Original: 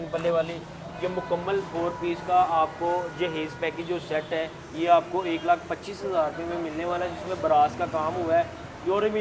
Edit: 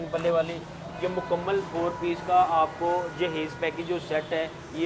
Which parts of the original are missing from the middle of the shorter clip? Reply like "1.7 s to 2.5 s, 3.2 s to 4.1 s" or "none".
none